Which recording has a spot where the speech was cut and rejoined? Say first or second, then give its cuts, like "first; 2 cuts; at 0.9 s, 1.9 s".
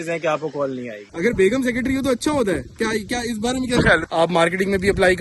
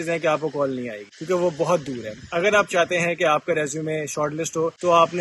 first; 2 cuts; at 1.1 s, 4.1 s